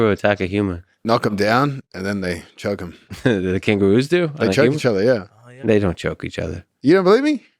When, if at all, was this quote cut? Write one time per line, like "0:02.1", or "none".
0:00.9
0:03.1